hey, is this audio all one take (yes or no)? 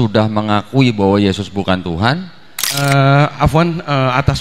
no